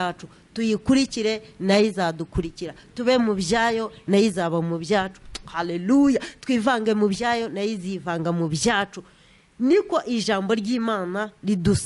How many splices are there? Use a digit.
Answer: 0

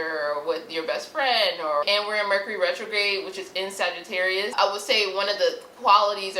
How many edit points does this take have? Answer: 2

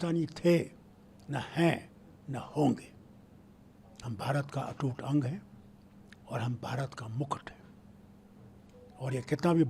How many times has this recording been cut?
0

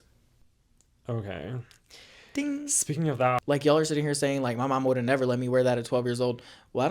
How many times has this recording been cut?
1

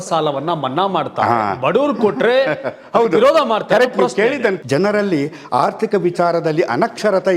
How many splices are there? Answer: 1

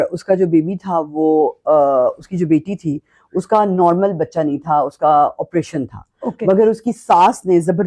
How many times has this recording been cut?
0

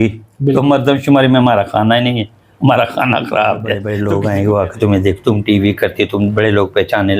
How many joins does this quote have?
1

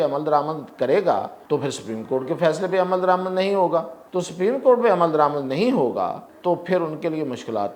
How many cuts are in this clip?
3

